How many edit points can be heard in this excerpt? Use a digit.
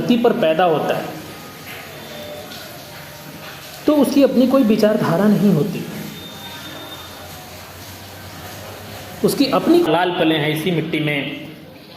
1